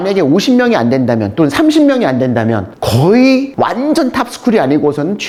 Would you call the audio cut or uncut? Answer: uncut